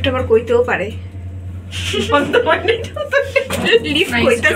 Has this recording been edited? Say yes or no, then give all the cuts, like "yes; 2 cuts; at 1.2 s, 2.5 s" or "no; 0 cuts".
no; 0 cuts